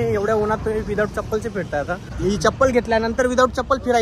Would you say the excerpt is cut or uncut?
cut